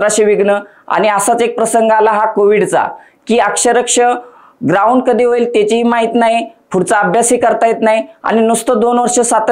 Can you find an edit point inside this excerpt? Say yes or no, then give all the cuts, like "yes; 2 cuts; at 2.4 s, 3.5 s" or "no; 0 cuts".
no; 0 cuts